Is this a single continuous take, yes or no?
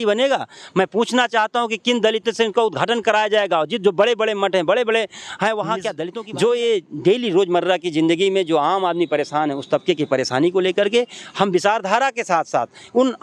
no